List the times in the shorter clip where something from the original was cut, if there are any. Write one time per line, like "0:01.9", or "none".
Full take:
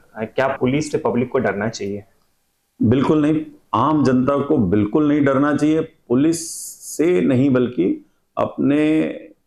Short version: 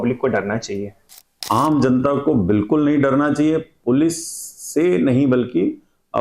0:01.3